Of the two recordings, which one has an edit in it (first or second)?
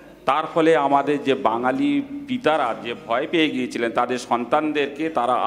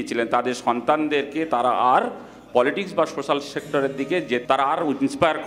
second